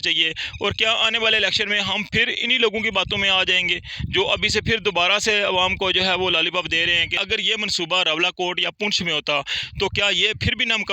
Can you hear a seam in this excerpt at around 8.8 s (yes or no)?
no